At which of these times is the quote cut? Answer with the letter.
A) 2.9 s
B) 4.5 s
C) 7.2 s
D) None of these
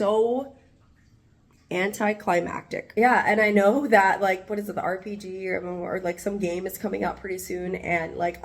A